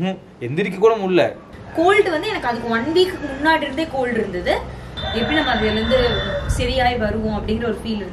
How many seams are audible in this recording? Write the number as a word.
two